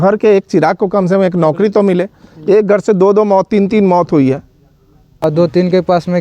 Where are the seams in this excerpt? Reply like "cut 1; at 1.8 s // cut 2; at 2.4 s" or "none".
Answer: cut 1; at 5.2 s